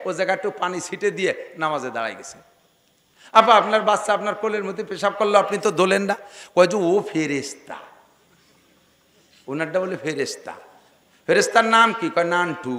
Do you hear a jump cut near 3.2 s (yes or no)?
no